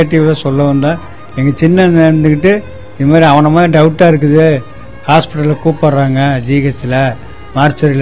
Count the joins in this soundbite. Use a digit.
0